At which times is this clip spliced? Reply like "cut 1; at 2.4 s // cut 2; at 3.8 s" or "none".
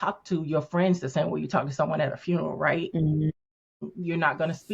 cut 1; at 3.3 s